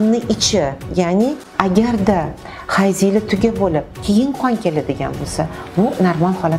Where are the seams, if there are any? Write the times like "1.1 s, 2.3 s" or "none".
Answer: 1.5 s